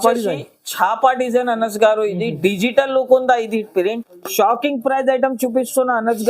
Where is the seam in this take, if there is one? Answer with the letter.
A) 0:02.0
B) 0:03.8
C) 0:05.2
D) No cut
B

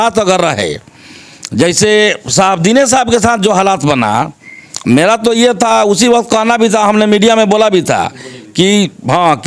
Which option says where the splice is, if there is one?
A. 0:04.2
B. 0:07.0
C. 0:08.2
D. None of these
D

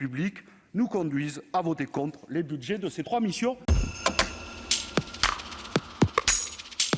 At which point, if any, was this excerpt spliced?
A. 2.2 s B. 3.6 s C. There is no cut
B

